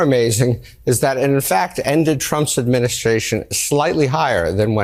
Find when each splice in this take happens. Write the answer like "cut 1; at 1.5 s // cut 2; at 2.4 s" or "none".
none